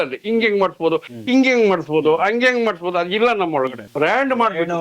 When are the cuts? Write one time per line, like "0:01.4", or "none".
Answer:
0:03.8